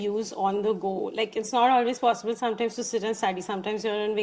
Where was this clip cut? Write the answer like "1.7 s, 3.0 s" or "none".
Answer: none